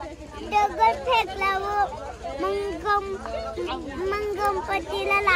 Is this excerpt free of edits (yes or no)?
yes